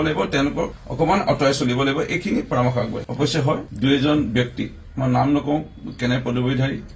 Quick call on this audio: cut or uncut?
uncut